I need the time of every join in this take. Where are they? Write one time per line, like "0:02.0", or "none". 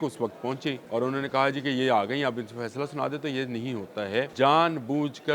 0:00.8
0:04.3